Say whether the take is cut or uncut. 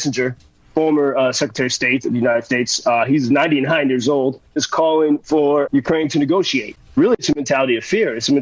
cut